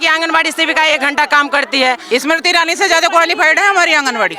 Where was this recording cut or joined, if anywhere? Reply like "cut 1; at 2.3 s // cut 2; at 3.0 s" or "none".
cut 1; at 2.0 s